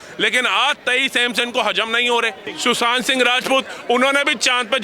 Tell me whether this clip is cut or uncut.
cut